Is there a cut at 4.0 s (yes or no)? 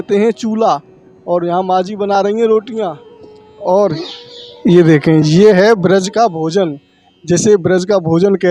yes